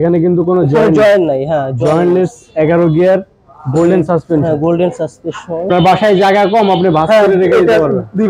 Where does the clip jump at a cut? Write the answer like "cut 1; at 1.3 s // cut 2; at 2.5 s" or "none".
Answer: cut 1; at 5.7 s